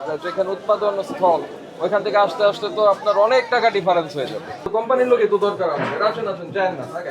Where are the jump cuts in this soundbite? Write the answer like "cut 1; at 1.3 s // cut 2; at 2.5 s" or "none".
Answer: cut 1; at 4.7 s